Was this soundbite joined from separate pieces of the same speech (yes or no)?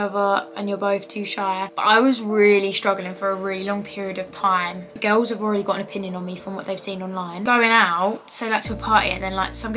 yes